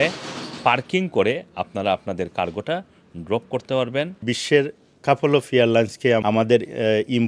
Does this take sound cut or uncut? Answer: cut